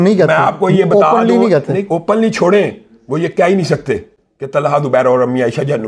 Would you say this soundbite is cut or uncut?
uncut